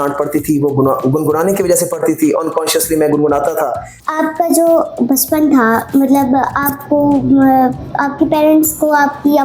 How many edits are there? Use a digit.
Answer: 1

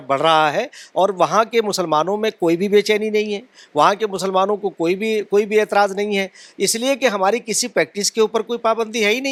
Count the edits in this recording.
0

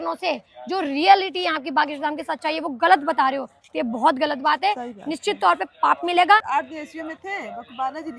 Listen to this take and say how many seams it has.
1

